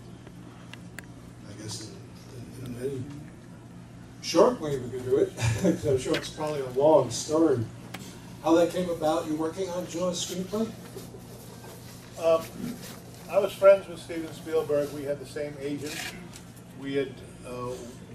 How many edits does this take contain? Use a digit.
1